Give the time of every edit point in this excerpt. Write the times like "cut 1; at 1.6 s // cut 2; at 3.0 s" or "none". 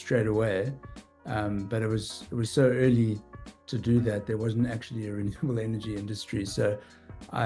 none